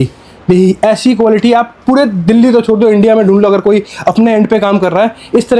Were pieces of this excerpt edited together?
no; 0 cuts

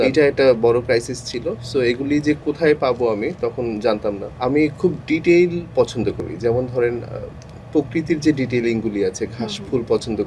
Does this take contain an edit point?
yes; 1 cut; at 4.3 s

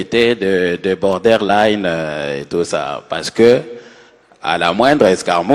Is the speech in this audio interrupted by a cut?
no; 0 cuts

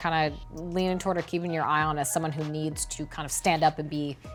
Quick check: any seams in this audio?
no; 0 cuts

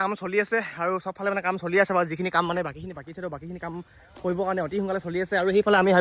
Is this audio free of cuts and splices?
yes; 0 cuts

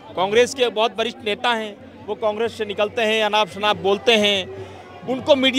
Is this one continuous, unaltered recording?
yes; 0 cuts

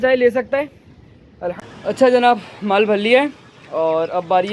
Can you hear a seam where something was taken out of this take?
yes; 1 cut; at 1.6 s

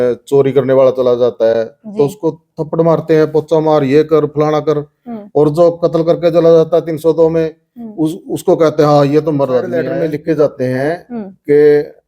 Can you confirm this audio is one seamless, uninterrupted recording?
no; 1 cut; at 9.9 s

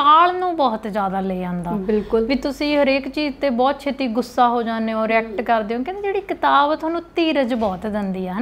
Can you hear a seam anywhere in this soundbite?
no; 0 cuts

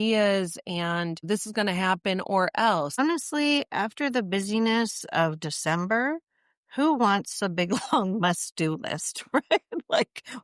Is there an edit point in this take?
yes; 2 cuts; at 1.2 s, 3.0 s

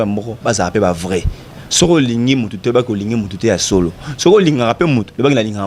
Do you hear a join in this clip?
no; 0 cuts

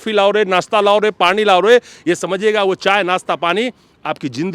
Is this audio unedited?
yes; 0 cuts

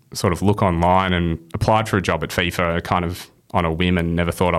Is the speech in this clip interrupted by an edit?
no; 0 cuts

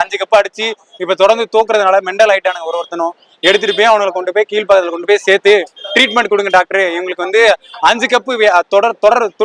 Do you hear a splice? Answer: no; 0 cuts

